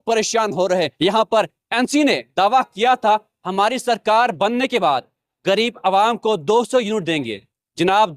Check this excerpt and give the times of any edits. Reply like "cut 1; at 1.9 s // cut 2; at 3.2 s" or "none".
cut 1; at 0.9 s